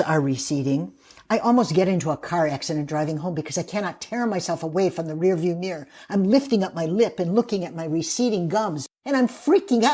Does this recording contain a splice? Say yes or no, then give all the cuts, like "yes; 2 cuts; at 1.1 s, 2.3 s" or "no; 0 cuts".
yes; 1 cut; at 8.9 s